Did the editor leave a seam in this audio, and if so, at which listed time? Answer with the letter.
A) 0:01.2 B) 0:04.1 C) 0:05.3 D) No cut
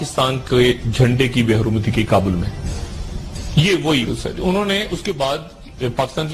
B